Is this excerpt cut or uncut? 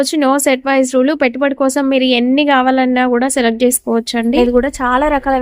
cut